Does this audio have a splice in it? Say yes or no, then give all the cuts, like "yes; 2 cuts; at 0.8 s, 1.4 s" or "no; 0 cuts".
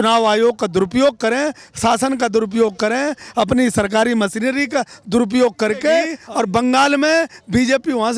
yes; 1 cut; at 6.2 s